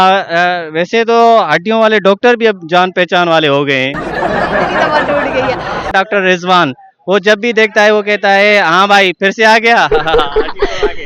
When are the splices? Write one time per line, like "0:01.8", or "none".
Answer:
0:05.9